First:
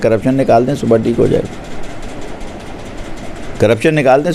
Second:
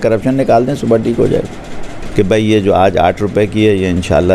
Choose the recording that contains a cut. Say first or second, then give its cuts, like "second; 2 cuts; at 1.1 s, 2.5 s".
second; 1 cut; at 2.0 s